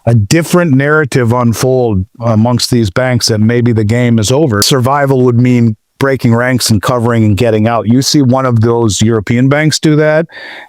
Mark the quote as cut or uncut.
cut